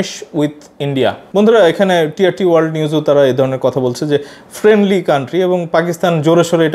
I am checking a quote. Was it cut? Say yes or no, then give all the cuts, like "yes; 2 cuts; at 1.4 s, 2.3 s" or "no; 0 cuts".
no; 0 cuts